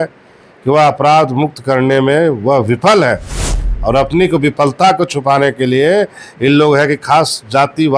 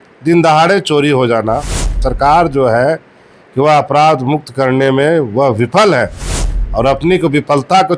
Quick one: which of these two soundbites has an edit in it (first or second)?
second